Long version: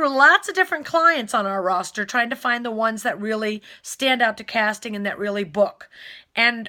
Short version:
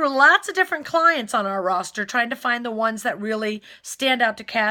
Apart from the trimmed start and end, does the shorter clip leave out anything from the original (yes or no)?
no